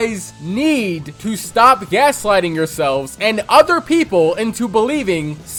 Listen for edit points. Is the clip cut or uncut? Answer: uncut